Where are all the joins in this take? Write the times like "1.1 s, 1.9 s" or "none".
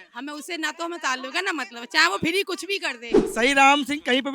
3.2 s